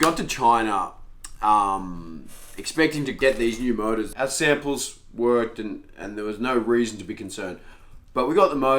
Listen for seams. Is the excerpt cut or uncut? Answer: cut